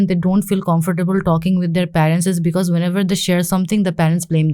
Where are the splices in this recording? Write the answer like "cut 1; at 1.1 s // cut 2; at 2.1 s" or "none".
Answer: none